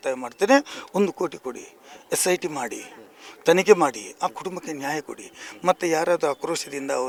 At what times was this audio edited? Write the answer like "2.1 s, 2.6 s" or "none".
none